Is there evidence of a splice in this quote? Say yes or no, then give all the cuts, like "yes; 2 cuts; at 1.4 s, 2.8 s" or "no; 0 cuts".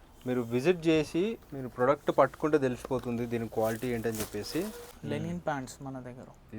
yes; 1 cut; at 4.9 s